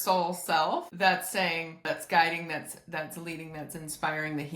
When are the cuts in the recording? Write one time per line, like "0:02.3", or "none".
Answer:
0:01.8